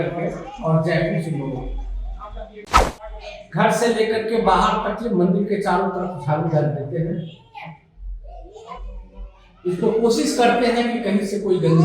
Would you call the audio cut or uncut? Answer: cut